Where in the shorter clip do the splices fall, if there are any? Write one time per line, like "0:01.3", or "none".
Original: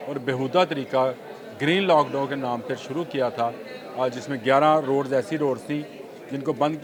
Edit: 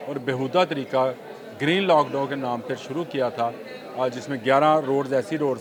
none